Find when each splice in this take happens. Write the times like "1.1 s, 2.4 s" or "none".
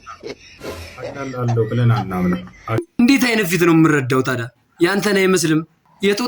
2.9 s

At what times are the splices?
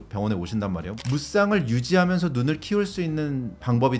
none

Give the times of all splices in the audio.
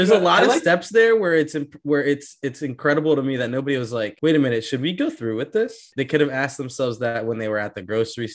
4.1 s, 5.9 s

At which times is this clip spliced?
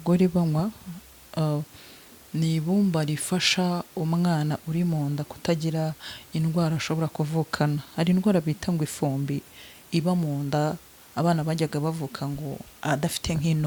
none

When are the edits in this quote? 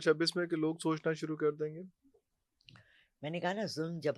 none

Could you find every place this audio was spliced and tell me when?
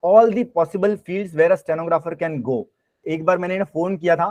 3.0 s

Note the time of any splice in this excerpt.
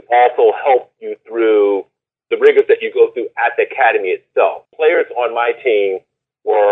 4.6 s

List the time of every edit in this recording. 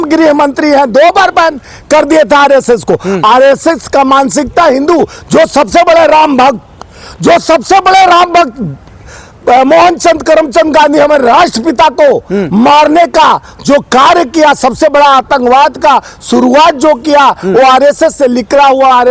none

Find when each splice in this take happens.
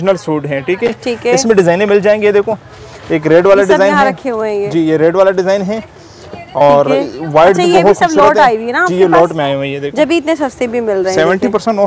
none

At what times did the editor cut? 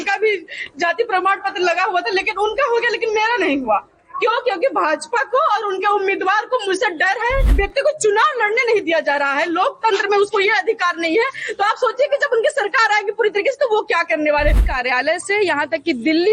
7.5 s, 14.6 s

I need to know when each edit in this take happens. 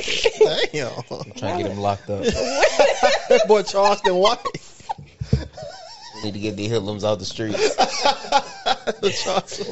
none

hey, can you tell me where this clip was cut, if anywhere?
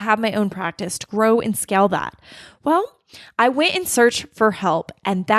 none

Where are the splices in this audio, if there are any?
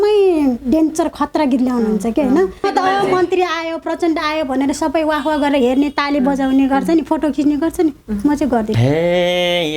2.7 s, 8.7 s

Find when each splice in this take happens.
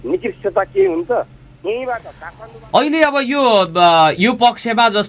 2.2 s

